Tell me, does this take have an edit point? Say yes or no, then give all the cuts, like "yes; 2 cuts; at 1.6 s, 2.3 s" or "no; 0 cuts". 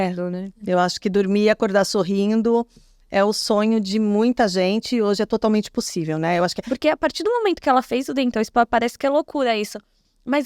yes; 1 cut; at 6.6 s